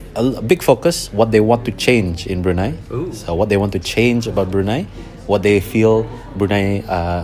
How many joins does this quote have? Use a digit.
0